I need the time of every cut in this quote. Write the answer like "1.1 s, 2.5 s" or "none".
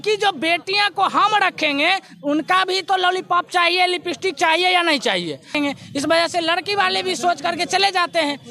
5.5 s